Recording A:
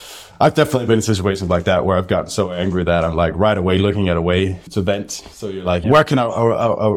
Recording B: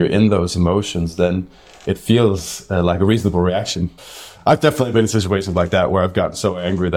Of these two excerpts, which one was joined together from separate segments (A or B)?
A